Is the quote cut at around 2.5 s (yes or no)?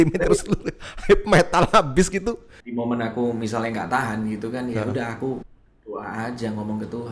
yes